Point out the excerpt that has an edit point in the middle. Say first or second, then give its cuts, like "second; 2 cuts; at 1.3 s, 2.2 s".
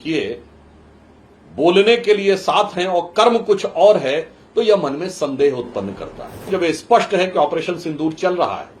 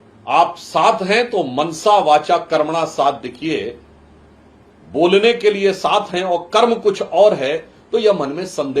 first; 1 cut; at 6.5 s